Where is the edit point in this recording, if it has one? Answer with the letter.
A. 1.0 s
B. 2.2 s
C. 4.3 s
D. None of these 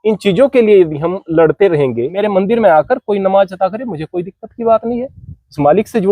B